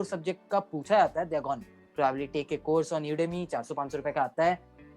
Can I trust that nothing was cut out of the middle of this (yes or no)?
no